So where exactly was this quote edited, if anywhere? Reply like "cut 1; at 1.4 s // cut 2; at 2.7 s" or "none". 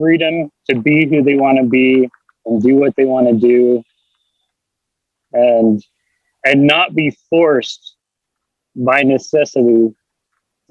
none